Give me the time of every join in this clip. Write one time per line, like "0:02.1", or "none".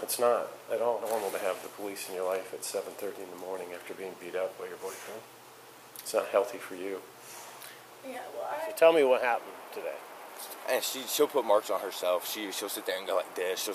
0:01.0
0:08.7